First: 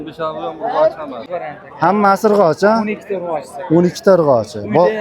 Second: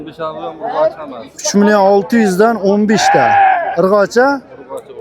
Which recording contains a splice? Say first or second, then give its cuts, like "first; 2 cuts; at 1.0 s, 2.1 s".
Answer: first; 1 cut; at 1.3 s